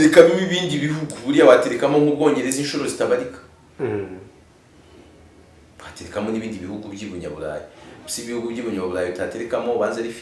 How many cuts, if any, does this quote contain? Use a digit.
0